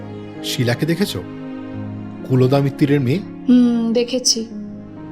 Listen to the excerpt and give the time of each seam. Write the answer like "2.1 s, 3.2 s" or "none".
3.3 s